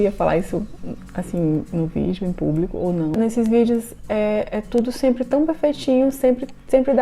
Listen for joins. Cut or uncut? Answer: cut